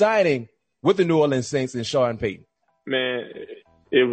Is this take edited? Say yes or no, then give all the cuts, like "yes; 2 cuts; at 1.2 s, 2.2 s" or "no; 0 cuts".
no; 0 cuts